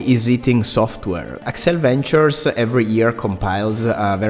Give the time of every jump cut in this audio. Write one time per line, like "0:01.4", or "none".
0:01.5